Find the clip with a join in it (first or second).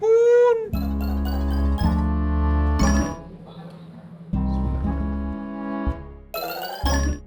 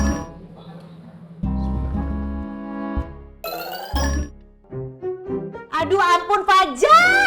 second